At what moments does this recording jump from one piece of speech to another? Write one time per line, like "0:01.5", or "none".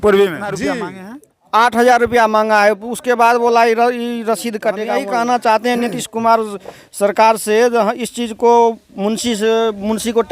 0:00.7
0:04.8